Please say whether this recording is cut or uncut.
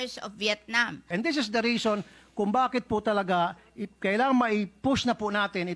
cut